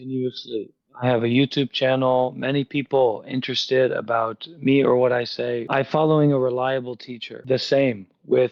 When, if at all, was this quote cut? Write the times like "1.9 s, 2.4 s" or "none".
5.6 s, 7.3 s